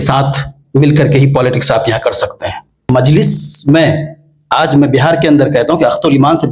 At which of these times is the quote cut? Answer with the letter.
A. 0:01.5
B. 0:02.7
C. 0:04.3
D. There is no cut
B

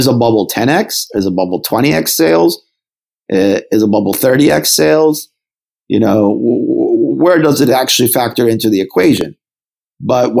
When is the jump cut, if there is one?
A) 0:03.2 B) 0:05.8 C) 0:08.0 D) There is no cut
D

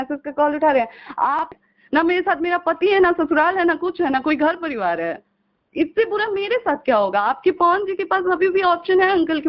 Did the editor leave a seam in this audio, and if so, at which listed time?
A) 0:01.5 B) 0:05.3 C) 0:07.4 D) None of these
A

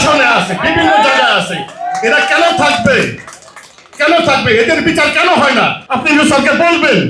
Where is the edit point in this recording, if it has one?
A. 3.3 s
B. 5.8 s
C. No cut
B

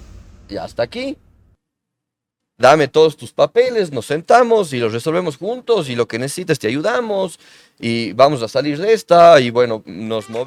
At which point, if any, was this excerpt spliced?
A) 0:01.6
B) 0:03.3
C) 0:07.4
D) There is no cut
D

